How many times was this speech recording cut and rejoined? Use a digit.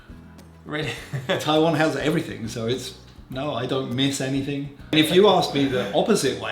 1